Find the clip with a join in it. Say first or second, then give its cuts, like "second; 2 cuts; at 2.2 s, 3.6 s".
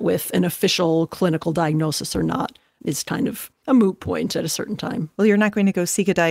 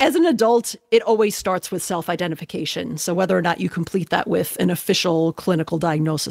first; 2 cuts; at 3.0 s, 4.6 s